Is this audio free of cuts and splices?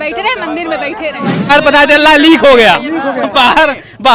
no; 1 cut; at 1.5 s

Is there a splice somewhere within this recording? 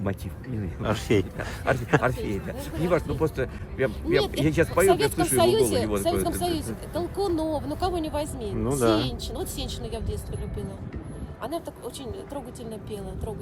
no; 0 cuts

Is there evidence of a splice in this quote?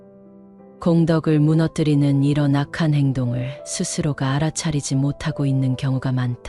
no; 0 cuts

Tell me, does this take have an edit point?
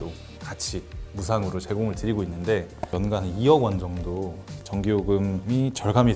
no; 0 cuts

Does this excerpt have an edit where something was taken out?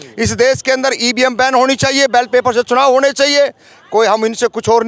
no; 0 cuts

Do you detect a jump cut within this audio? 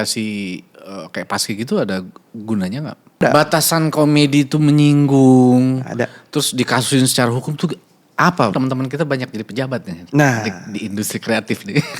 yes; 2 cuts; at 3.2 s, 8.5 s

